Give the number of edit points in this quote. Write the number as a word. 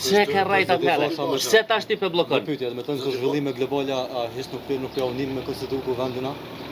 zero